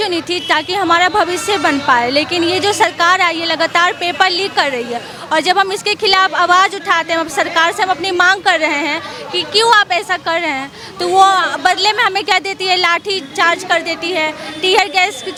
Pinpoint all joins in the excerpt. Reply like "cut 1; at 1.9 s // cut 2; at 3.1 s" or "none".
none